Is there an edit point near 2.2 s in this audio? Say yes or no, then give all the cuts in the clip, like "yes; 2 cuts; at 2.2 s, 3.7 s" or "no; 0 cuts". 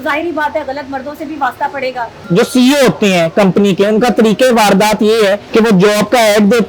yes; 2 cuts; at 2.2 s, 5.4 s